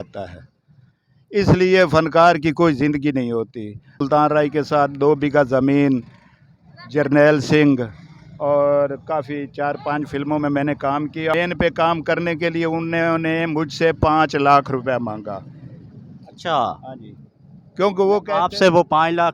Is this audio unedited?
no; 2 cuts; at 4.0 s, 11.3 s

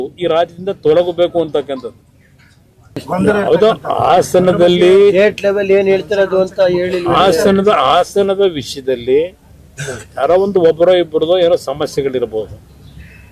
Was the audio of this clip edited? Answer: yes; 1 cut; at 3.0 s

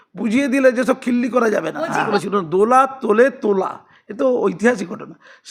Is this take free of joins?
no; 1 cut; at 2.2 s

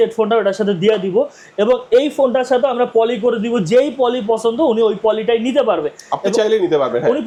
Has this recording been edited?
no; 0 cuts

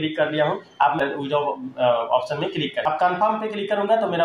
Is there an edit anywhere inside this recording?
yes; 2 cuts; at 1.0 s, 2.8 s

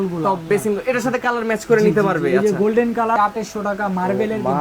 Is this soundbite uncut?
no; 1 cut; at 3.2 s

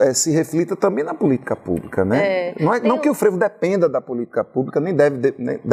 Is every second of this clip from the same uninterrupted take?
yes; 0 cuts

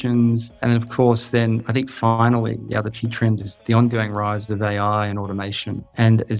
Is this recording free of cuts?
yes; 0 cuts

